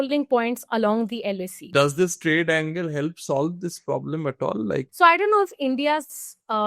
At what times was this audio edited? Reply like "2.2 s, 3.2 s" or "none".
1.6 s, 4.9 s